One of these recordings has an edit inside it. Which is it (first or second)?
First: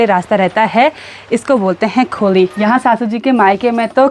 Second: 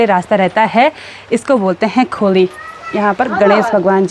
first